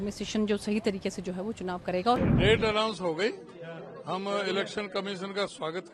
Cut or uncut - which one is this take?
cut